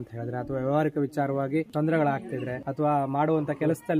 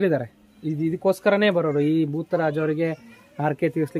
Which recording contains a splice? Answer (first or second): first